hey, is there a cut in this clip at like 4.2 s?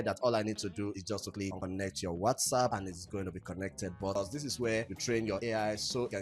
yes; 1 cut; at 4.2 s

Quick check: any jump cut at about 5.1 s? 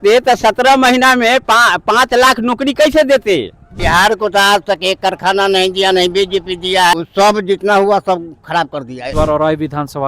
no; 3 cuts; at 3.7 s, 6.9 s, 9.1 s

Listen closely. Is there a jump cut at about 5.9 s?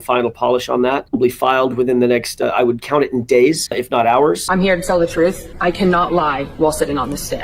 no; 3 cuts; at 1.1 s, 3.7 s, 4.4 s

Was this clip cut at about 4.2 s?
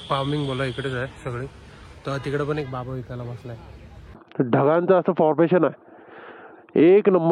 yes; 1 cut; at 4.2 s

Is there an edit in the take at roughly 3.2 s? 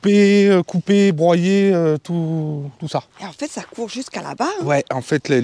yes; 1 cut; at 3.2 s

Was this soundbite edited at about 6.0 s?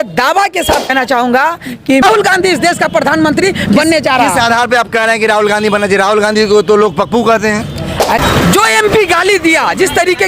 no; 3 cuts; at 0.8 s, 2.0 s, 8.2 s

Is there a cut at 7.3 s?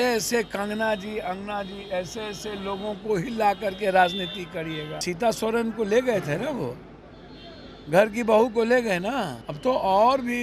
no; 2 cuts; at 5.0 s, 9.4 s

